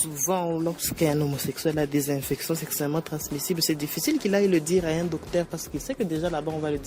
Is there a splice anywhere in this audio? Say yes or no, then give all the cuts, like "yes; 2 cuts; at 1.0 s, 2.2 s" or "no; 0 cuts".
no; 0 cuts